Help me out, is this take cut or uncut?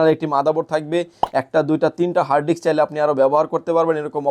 cut